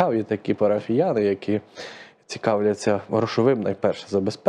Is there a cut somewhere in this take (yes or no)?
no